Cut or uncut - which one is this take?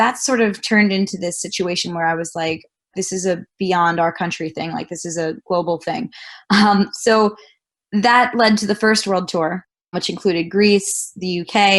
uncut